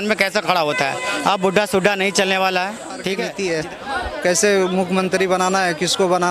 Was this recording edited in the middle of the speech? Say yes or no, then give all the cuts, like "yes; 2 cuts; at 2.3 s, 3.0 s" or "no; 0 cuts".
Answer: yes; 1 cut; at 3.2 s